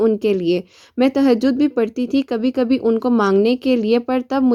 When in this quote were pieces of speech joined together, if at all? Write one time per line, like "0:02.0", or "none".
none